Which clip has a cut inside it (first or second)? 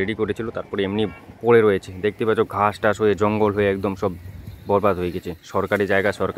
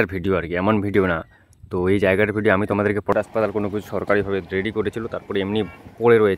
second